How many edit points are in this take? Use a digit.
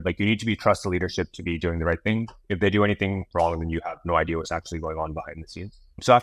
0